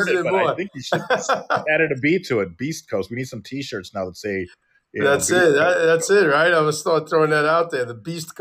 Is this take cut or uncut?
uncut